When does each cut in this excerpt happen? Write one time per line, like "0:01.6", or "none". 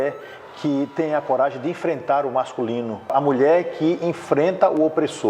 0:03.1